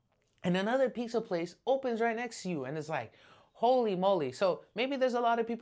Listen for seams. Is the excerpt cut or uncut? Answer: uncut